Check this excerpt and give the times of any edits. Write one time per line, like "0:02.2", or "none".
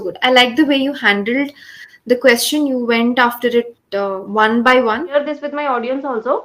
0:05.1